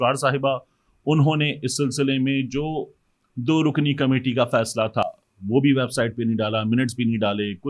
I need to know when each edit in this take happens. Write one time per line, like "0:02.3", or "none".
none